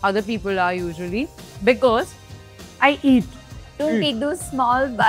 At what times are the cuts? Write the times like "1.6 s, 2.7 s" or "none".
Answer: 1.4 s, 3.8 s